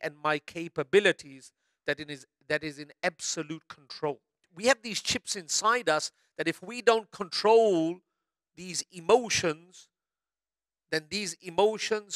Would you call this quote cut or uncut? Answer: cut